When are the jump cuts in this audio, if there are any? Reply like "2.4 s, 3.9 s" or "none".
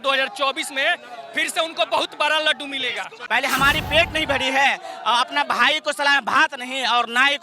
3.2 s